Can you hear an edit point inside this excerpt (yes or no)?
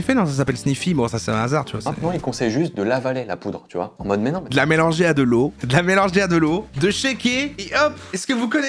no